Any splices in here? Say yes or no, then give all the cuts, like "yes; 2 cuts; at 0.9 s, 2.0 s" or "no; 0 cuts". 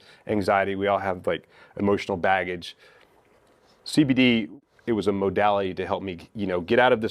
yes; 1 cut; at 4.5 s